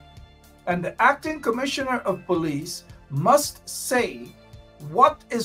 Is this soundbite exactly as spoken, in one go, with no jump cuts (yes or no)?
yes